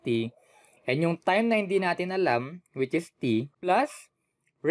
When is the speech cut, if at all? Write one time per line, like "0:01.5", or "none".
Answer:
0:03.7